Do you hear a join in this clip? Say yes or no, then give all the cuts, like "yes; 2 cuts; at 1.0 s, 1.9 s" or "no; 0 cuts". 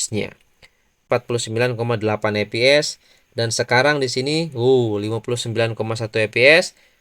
yes; 1 cut; at 1.0 s